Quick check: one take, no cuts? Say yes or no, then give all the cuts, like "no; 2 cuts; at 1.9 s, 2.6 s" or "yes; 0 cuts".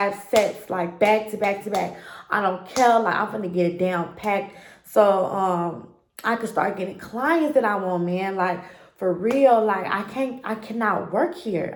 yes; 0 cuts